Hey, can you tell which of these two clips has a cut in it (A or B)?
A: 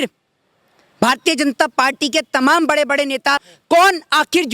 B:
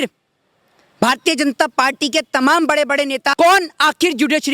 B